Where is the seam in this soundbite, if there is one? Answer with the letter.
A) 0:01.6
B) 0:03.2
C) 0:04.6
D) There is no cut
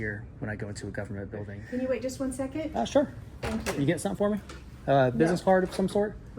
A